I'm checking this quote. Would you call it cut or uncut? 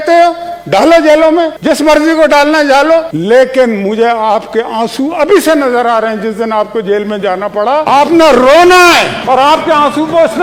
uncut